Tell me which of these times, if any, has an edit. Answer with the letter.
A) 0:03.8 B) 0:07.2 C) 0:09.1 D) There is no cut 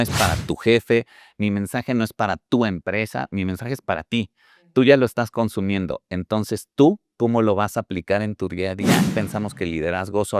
C